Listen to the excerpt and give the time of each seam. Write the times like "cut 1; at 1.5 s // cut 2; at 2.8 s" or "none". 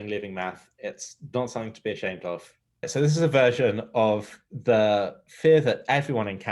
cut 1; at 2.9 s